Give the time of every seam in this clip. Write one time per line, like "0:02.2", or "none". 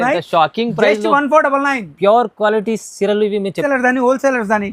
0:03.6